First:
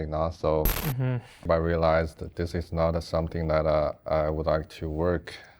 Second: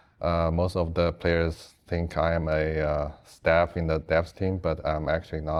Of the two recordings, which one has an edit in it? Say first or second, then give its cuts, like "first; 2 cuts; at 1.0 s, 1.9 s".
first; 1 cut; at 1.4 s